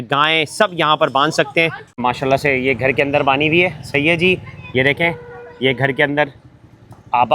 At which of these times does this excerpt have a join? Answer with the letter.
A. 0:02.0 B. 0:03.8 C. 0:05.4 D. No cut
A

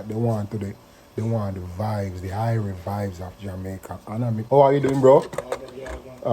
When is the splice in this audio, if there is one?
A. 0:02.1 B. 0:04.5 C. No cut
B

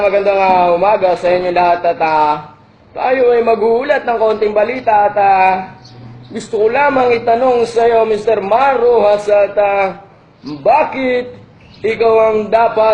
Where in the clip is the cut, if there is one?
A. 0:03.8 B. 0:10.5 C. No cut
C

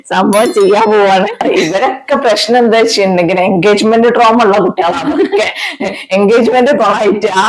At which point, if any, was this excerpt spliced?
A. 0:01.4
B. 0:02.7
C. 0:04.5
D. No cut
A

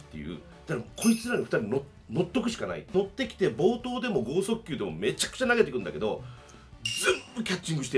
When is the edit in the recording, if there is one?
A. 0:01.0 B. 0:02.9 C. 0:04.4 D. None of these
B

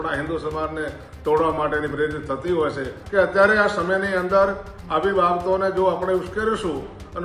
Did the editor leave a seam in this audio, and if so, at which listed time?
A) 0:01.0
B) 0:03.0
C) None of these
B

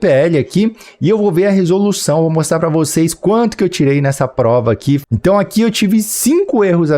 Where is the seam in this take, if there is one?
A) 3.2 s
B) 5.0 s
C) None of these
B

